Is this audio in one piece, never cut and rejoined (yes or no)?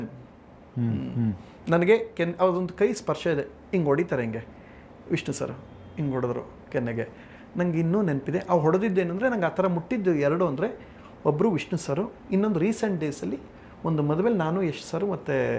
yes